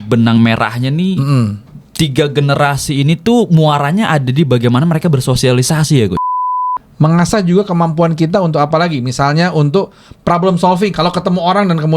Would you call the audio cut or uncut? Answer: cut